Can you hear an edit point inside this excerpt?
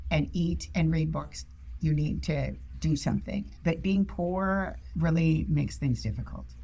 yes; 2 cuts; at 3.5 s, 4.8 s

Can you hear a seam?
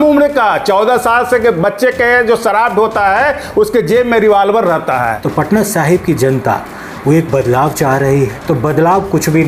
yes; 2 cuts; at 5.2 s, 8.4 s

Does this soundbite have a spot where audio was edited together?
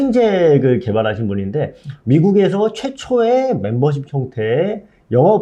no; 0 cuts

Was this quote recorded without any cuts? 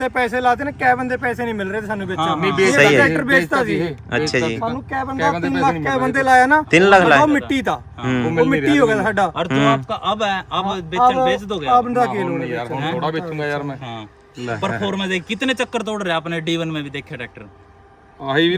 yes; 0 cuts

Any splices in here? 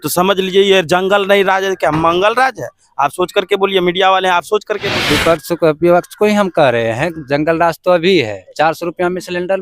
yes; 1 cut; at 4.9 s

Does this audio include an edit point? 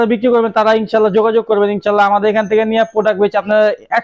no; 0 cuts

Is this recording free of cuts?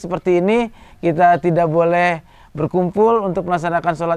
yes; 0 cuts

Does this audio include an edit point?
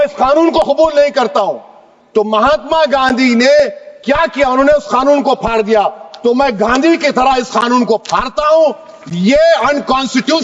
no; 0 cuts

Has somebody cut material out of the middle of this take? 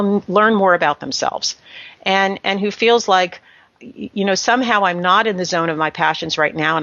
no; 0 cuts

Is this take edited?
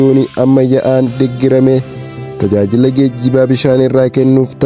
no; 0 cuts

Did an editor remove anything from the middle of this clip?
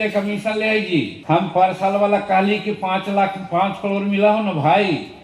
yes; 1 cut; at 1.2 s

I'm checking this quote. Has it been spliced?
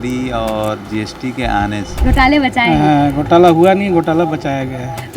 yes; 1 cut; at 1.9 s

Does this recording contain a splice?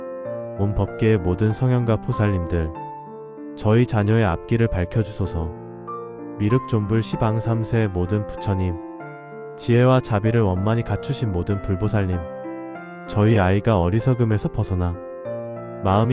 no; 0 cuts

